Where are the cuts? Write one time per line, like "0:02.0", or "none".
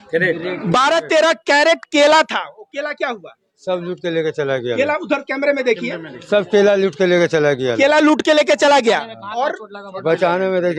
none

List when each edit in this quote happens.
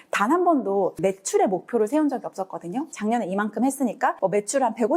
0:00.9
0:04.2

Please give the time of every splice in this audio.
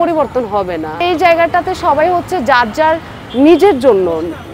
0:01.0

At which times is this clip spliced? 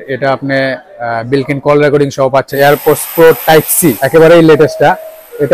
0:02.5
0:04.0

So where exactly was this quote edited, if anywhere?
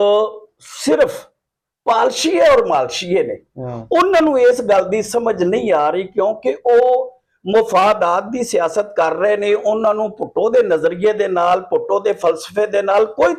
none

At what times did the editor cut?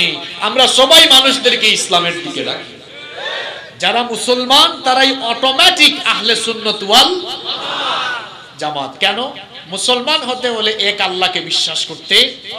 0:03.2

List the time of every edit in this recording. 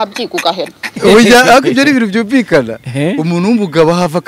0:01.0

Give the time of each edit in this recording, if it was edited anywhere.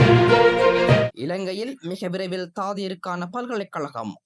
0:01.1

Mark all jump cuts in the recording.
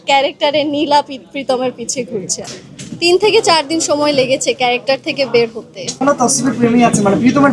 0:02.4
0:06.0

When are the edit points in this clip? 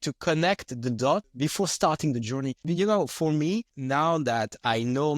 0:01.3
0:02.6
0:03.7

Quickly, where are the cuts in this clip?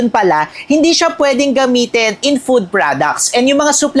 none

